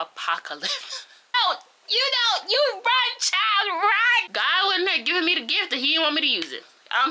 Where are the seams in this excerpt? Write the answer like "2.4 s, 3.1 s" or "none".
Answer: 1.3 s, 4.3 s